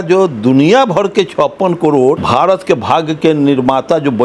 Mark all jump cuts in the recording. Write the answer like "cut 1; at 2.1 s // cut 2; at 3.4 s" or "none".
cut 1; at 2.2 s